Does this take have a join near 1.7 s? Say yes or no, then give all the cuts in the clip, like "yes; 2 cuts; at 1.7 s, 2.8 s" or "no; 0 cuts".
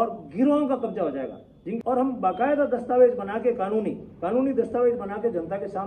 yes; 1 cut; at 1.7 s